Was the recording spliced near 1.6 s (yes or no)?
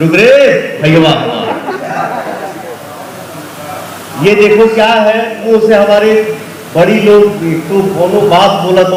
no